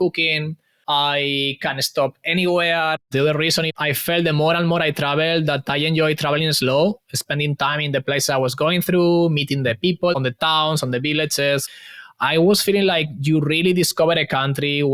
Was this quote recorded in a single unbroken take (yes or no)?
no